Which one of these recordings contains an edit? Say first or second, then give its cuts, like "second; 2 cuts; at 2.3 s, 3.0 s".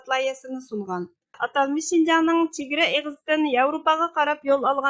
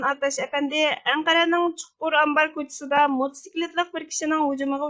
first; 1 cut; at 1.4 s